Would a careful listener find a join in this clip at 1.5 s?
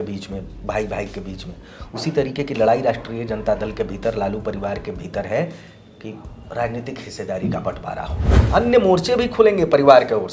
no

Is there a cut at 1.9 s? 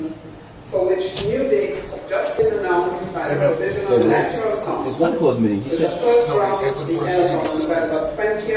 no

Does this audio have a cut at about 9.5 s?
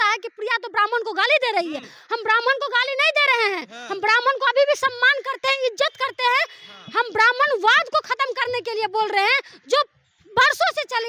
no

